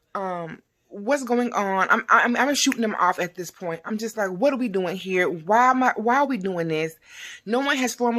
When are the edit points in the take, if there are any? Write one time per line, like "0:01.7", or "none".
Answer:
none